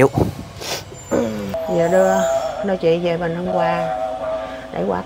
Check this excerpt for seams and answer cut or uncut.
cut